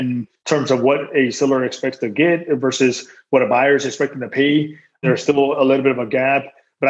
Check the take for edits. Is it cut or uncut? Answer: uncut